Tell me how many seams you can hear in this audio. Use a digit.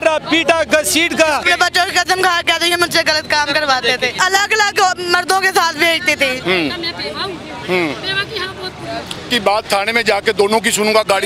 4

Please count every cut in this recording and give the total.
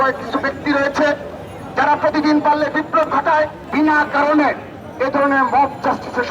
1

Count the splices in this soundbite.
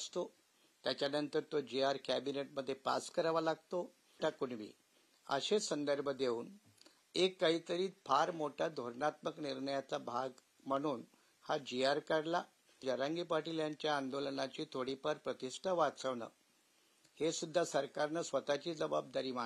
2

